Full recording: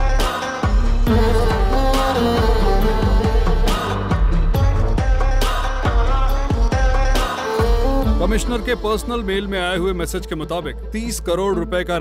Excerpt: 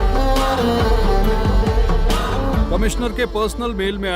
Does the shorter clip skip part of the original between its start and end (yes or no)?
yes